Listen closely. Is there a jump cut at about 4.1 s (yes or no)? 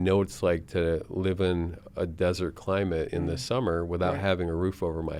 no